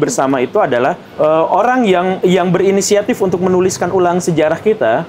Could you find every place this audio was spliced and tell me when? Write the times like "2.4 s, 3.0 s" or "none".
1.0 s, 2.2 s